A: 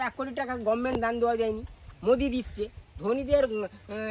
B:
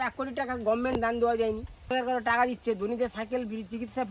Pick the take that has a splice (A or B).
B